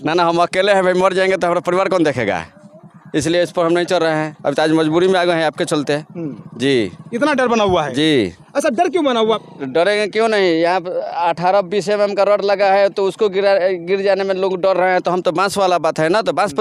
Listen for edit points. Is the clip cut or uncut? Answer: uncut